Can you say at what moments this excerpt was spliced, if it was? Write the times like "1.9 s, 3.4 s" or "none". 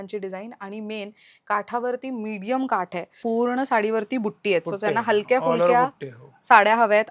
3.2 s